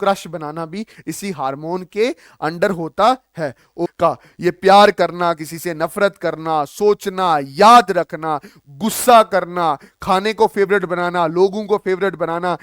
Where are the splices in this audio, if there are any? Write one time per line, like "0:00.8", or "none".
0:03.9